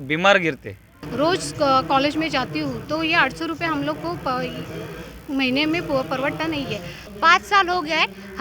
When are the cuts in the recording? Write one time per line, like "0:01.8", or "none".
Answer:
0:01.0
0:07.0